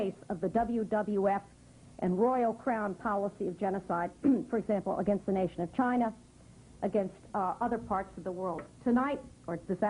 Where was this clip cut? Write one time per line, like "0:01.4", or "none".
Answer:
0:07.4